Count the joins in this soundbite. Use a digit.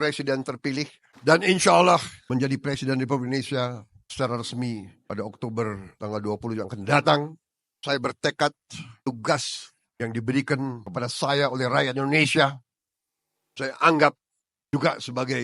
2